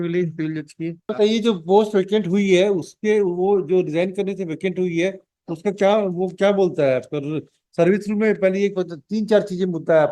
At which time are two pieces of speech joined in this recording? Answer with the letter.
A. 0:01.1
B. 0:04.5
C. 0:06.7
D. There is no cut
A